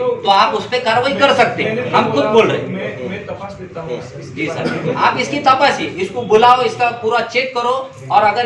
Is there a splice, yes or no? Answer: no